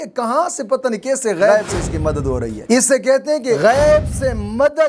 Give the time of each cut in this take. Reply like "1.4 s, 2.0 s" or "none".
none